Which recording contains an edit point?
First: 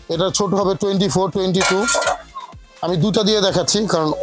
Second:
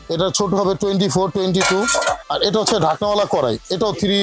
second; 1 cut; at 2.3 s

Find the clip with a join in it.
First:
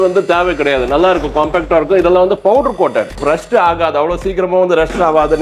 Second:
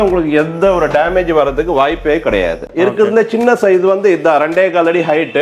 second; 1 cut; at 2.6 s

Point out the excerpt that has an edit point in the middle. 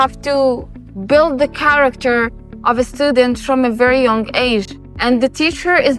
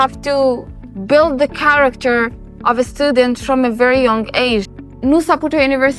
second; 1 cut; at 4.8 s

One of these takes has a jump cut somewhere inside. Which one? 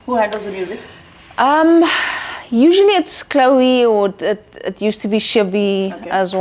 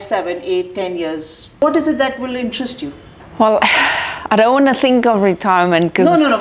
second; 1 cut; at 1.6 s

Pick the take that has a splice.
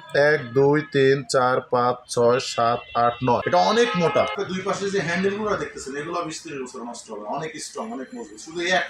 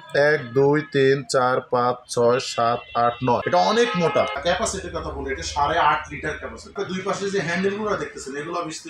first; 1 cut; at 4.3 s

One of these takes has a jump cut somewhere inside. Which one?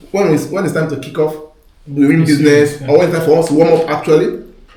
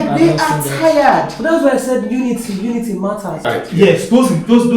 second; 1 cut; at 3.4 s

